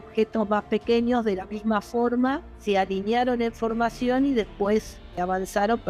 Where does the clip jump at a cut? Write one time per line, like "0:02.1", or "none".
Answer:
0:02.5
0:05.2

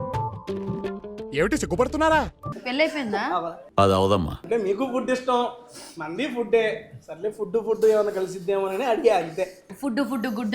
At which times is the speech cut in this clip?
0:02.4
0:03.6
0:04.4
0:09.7

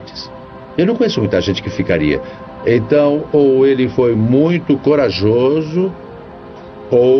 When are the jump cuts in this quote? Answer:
0:02.1

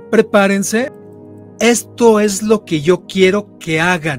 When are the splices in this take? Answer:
0:00.9

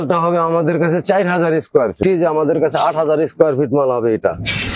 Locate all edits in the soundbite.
0:02.0

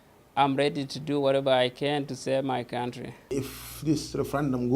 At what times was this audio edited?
0:03.3

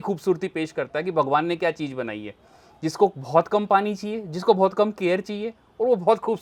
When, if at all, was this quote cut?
none

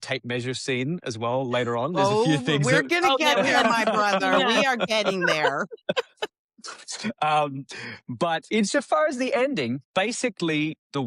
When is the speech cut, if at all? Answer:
0:09.8

